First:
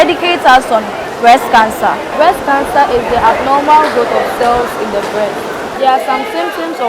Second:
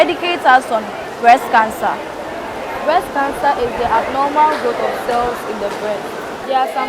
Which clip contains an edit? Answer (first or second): first